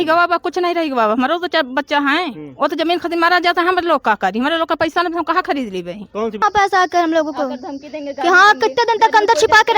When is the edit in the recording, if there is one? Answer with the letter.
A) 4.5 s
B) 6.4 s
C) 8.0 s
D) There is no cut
B